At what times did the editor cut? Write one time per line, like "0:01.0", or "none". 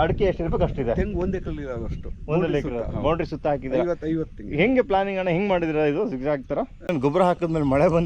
0:06.9